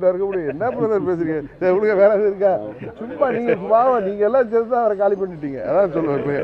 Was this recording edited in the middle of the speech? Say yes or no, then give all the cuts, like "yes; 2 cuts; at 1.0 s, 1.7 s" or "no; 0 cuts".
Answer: no; 0 cuts